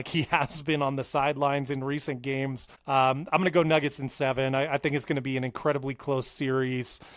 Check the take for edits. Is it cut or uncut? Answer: cut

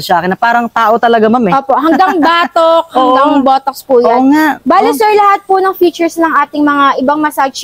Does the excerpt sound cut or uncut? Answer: uncut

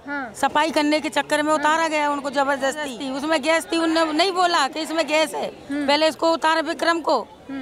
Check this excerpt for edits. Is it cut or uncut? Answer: cut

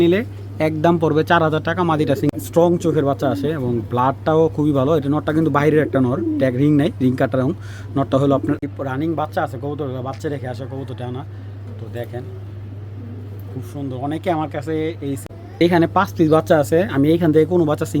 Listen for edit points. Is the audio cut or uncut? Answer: cut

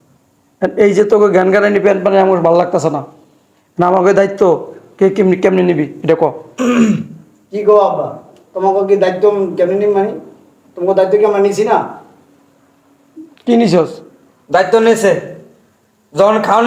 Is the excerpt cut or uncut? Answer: uncut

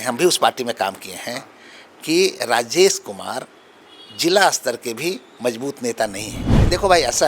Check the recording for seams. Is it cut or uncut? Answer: cut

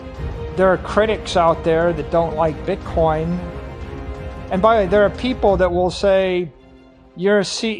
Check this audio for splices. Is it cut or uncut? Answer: uncut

